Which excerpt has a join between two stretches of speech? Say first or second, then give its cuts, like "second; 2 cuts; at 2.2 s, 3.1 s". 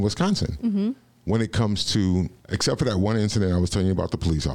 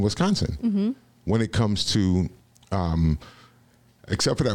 first; 1 cut; at 2.4 s